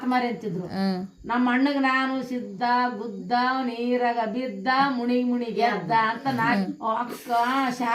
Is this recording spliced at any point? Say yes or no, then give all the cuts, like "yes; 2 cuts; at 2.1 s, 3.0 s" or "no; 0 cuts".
yes; 1 cut; at 6.6 s